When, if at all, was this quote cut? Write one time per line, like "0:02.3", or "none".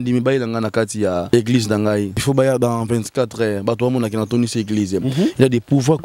0:01.3
0:02.2